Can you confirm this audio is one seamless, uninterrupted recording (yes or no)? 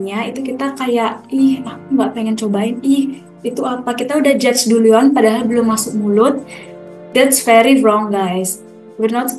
yes